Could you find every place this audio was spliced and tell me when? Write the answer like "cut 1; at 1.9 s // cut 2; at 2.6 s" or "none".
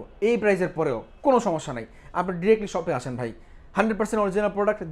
none